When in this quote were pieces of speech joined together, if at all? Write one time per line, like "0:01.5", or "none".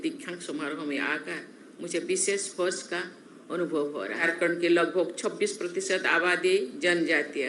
0:04.2